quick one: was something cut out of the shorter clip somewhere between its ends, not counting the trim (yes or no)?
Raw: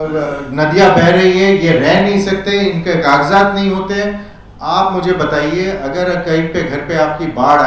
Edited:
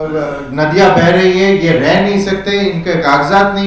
no